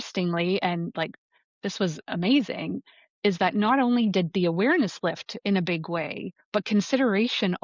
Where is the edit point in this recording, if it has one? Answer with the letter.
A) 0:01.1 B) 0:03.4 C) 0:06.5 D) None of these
D